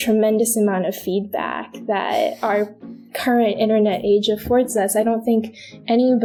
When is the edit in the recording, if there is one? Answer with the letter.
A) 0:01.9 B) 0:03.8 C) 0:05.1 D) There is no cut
D